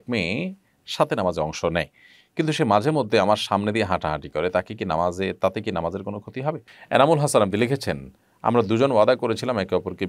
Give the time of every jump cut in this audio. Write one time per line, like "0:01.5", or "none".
0:06.7